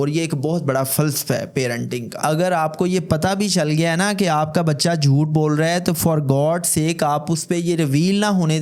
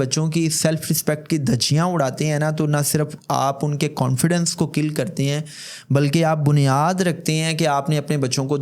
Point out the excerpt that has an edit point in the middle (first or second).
first